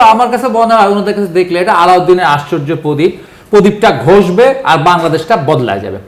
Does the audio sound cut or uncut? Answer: uncut